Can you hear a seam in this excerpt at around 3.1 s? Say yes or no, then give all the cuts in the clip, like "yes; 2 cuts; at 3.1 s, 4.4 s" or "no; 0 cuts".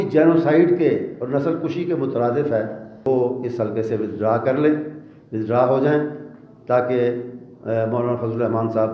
yes; 1 cut; at 3.1 s